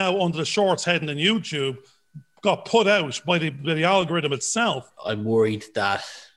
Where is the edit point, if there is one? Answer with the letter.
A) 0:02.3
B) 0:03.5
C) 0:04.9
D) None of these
C